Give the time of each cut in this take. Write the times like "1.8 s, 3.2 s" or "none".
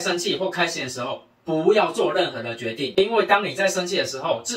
none